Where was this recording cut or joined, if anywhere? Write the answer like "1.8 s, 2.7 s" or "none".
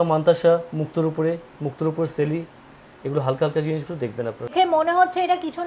4.5 s